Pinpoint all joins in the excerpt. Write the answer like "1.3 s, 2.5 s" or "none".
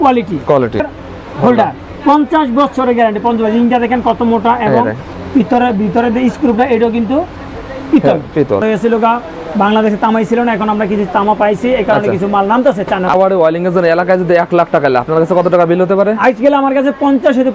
0.8 s, 8.6 s, 13.1 s